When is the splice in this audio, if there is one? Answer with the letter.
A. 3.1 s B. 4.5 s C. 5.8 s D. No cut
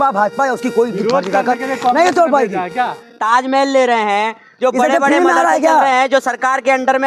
A